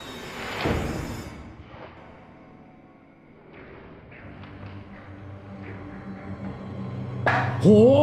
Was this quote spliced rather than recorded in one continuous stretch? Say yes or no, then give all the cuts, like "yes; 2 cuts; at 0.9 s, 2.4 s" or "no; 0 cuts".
no; 0 cuts